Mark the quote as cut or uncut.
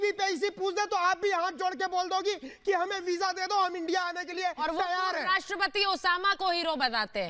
uncut